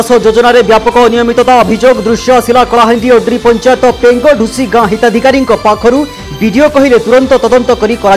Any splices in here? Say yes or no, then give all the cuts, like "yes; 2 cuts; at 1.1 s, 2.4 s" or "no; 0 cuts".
no; 0 cuts